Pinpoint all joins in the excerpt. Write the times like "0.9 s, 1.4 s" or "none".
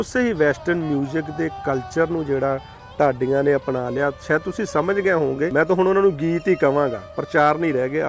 5.5 s